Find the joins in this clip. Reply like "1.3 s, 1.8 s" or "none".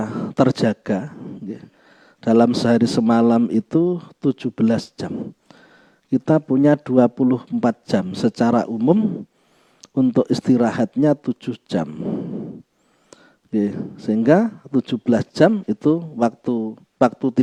none